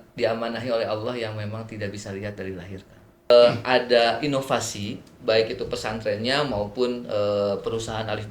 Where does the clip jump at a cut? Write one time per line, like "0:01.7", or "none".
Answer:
0:03.3